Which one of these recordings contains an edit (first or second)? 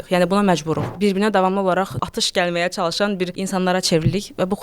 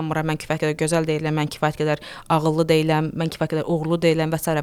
first